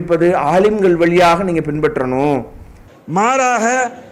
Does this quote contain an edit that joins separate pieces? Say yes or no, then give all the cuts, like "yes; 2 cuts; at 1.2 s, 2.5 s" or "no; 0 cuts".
no; 0 cuts